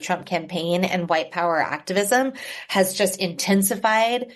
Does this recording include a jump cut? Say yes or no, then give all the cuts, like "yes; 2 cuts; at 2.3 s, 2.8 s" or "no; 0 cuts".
no; 0 cuts